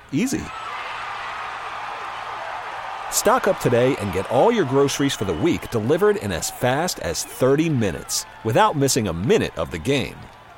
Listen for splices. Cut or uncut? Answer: uncut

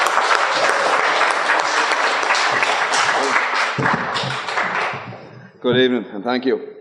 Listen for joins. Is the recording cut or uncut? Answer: cut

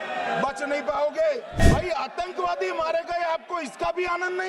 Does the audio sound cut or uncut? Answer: cut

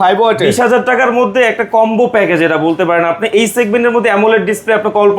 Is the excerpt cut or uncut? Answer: uncut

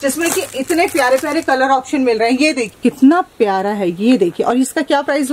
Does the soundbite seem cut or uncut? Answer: cut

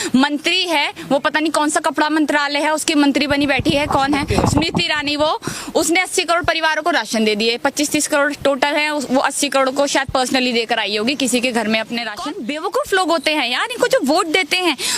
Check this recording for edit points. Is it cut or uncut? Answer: cut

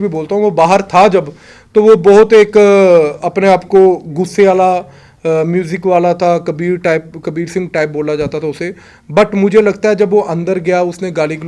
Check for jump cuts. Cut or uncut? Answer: uncut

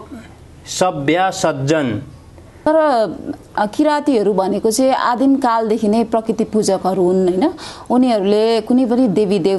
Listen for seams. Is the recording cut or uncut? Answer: cut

